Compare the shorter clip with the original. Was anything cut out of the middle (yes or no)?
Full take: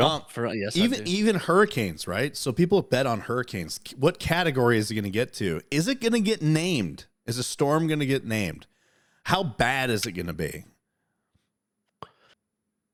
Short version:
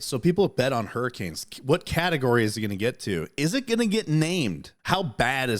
yes